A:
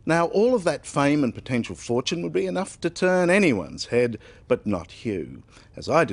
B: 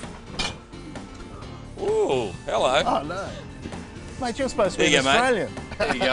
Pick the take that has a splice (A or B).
A